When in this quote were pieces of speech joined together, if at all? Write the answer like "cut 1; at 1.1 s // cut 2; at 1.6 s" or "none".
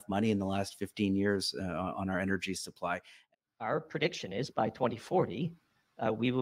cut 1; at 3.3 s